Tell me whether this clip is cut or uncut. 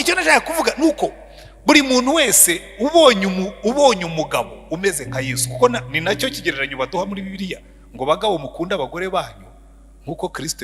uncut